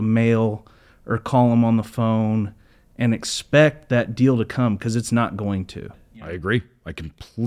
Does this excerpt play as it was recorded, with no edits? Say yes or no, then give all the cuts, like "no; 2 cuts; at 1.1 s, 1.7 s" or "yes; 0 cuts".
no; 1 cut; at 6.2 s